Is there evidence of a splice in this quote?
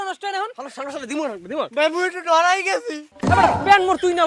yes; 1 cut; at 3.0 s

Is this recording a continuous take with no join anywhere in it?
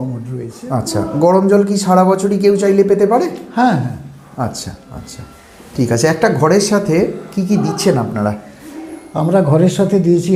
yes; 0 cuts

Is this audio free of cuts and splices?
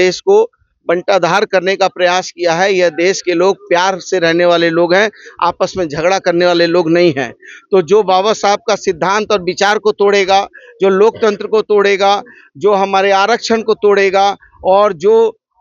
yes; 0 cuts

